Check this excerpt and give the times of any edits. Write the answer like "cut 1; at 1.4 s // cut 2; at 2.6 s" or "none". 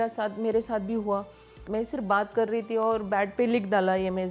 cut 1; at 1.6 s